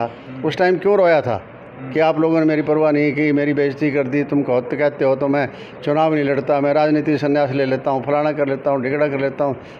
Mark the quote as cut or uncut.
uncut